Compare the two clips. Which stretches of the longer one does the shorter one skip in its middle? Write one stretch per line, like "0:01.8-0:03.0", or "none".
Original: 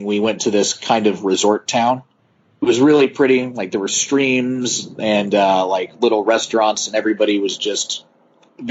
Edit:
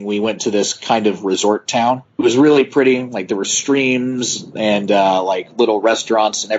0:02.1-0:02.5